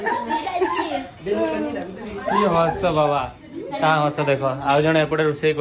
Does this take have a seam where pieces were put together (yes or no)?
no